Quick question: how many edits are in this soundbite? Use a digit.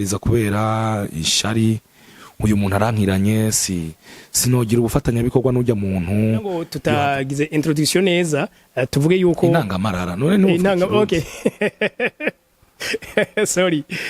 1